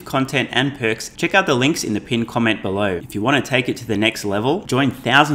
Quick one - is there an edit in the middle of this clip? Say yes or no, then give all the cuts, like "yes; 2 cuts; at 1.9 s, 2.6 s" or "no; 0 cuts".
yes; 2 cuts; at 1.1 s, 3.0 s